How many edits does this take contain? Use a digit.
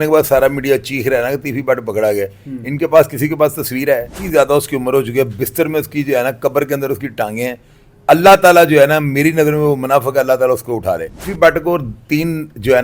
2